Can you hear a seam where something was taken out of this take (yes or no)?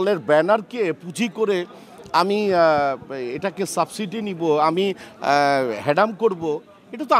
no